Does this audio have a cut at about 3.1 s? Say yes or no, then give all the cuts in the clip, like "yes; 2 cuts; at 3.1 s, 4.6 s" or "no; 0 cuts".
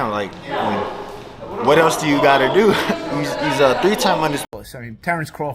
no; 1 cut; at 4.5 s